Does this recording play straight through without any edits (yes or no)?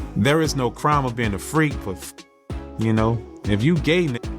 no